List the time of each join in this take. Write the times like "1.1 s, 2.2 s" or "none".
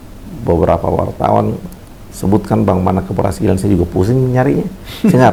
none